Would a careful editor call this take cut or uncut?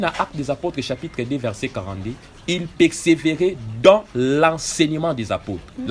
uncut